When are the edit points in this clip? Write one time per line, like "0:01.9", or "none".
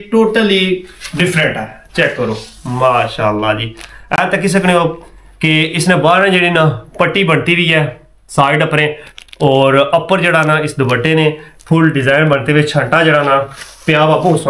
none